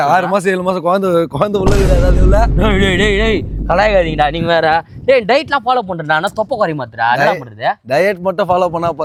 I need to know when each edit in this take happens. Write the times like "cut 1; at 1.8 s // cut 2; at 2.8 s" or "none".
none